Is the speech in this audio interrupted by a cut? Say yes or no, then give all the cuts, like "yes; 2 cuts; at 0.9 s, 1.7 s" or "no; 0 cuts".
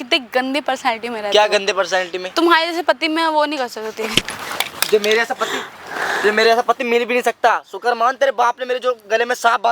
no; 0 cuts